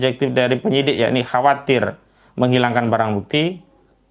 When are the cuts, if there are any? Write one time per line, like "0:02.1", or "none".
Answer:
none